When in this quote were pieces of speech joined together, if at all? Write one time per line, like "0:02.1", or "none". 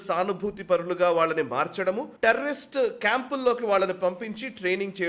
0:02.1